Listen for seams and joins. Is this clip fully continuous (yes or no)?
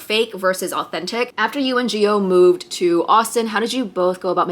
no